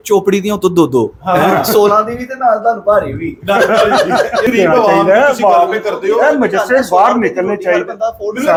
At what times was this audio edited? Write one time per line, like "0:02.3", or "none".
none